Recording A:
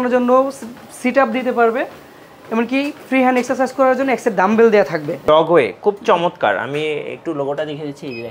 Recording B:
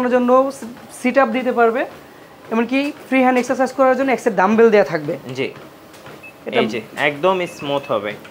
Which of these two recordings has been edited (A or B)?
A